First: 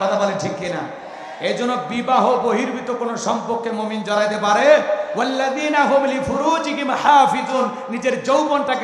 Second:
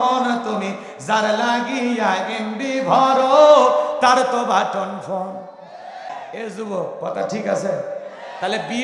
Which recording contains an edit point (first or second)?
second